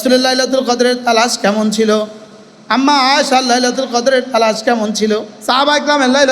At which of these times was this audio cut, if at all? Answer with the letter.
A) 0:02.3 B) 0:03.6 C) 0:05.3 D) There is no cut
C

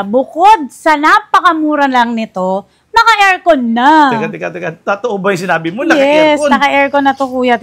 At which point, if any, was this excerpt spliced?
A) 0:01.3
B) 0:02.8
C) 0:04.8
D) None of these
D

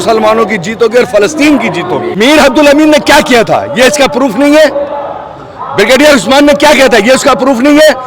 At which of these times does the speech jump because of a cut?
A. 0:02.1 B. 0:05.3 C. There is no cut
A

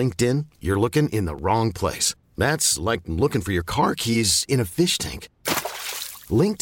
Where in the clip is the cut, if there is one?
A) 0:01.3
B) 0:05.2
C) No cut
C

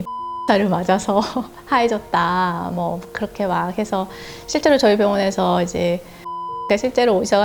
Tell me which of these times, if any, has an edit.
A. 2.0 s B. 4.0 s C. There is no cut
C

